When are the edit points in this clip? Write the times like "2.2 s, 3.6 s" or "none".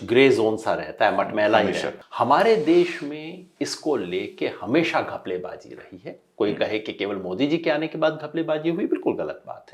2.0 s